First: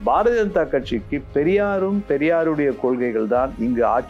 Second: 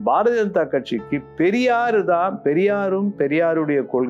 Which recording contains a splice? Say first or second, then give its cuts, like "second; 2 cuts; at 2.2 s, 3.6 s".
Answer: first; 1 cut; at 1.3 s